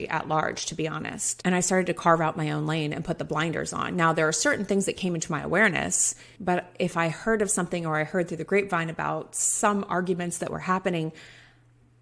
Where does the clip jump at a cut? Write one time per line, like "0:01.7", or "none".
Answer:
0:01.4